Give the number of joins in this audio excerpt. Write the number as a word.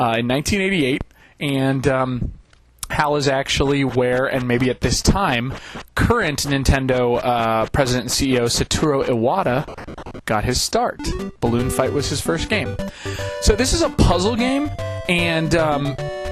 zero